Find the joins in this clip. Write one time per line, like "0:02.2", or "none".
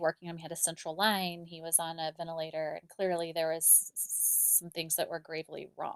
none